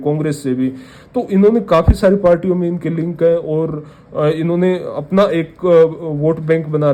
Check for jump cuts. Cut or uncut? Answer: uncut